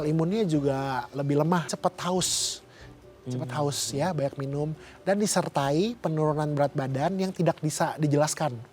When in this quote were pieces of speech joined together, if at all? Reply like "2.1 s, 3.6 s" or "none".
1.7 s